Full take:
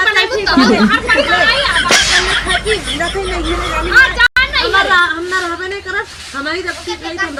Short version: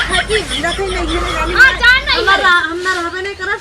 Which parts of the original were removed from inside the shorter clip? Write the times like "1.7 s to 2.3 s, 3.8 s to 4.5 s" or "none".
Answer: 4.3 s to 4.4 s